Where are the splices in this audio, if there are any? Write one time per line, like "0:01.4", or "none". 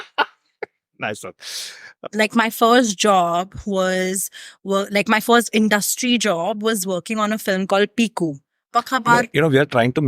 0:01.9
0:08.5